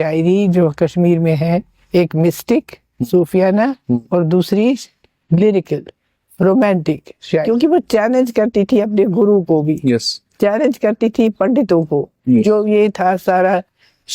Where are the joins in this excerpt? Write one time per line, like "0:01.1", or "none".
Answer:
0:07.4